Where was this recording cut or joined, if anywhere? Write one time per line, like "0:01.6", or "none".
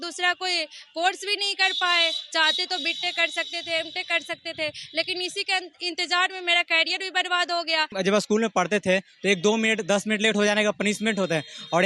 0:07.9